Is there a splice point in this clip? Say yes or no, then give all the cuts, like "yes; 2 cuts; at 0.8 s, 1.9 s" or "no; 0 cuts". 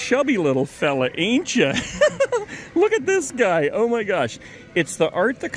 no; 0 cuts